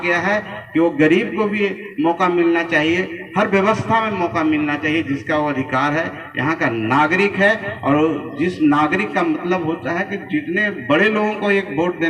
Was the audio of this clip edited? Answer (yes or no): no